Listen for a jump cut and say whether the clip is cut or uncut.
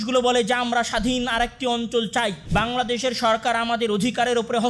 cut